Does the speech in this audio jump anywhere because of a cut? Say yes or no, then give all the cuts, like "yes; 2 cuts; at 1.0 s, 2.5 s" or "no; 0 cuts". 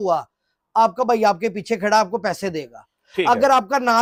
no; 0 cuts